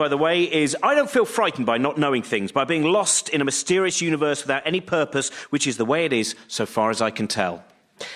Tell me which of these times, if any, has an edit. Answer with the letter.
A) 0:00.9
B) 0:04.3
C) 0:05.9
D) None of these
C